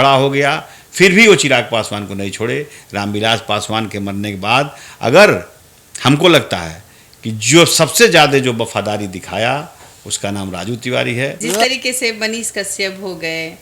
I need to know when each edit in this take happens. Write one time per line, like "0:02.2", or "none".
0:11.4